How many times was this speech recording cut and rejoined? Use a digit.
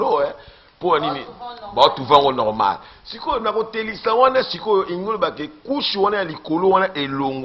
0